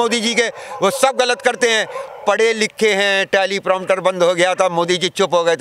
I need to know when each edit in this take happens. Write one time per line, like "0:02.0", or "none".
none